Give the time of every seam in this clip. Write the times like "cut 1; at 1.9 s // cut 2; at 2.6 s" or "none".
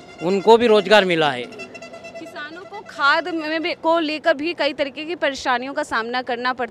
none